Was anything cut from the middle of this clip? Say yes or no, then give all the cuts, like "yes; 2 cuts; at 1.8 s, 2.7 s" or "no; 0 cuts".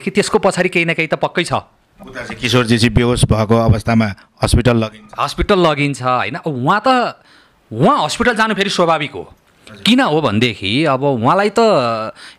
no; 0 cuts